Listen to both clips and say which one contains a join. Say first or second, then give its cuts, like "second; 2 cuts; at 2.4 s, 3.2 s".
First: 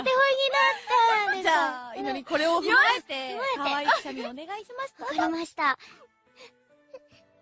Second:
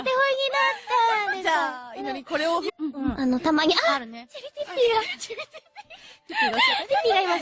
first; 1 cut; at 2.7 s